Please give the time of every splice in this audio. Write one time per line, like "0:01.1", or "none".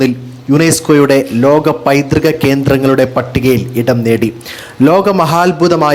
none